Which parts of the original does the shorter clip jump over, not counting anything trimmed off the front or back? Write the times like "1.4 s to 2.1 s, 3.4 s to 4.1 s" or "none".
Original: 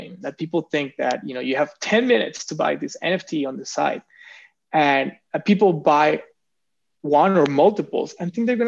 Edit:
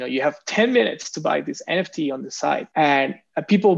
4.0 s to 4.6 s